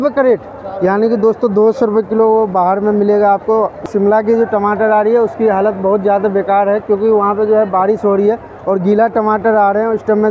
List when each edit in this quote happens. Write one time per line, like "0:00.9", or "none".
0:03.9